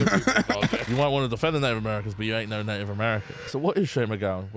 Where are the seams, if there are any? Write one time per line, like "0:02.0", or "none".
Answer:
0:00.9
0:03.5